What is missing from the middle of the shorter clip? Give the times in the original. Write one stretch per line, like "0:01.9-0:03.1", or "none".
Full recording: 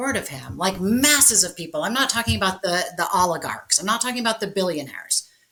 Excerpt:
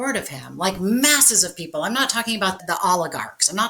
0:02.6-0:02.9